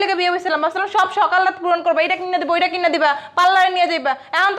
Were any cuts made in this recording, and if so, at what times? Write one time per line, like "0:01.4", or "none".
none